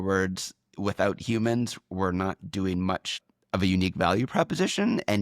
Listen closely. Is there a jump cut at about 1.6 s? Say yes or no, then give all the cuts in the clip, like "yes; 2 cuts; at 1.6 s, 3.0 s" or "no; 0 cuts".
no; 1 cut; at 3.1 s